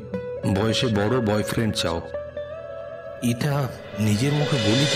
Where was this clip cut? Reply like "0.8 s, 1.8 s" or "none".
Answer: none